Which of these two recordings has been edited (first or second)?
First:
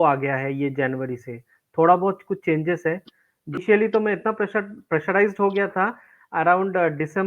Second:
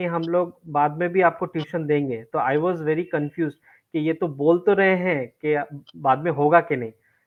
first